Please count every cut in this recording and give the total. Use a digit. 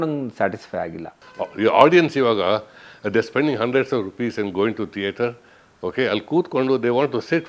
1